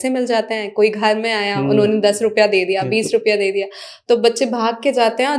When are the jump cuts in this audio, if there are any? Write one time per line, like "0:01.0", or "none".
none